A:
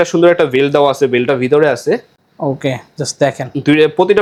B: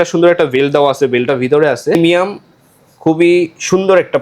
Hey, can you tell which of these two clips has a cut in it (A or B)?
B